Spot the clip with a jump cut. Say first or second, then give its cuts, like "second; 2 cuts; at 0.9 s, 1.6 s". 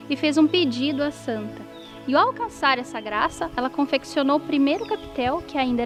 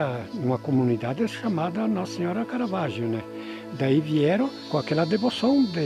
second; 1 cut; at 4.6 s